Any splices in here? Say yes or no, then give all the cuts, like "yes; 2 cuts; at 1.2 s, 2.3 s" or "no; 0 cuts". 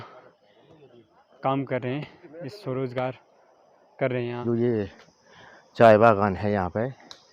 yes; 1 cut; at 4.4 s